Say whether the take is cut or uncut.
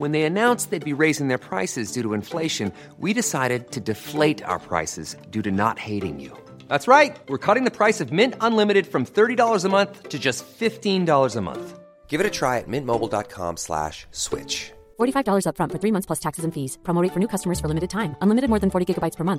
uncut